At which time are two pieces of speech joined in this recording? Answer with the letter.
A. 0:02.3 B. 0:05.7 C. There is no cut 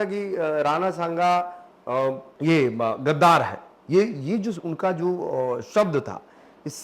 A